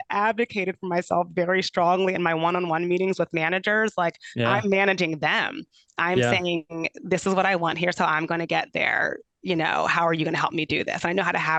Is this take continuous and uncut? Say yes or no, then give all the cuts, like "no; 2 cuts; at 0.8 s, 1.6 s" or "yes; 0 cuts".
yes; 0 cuts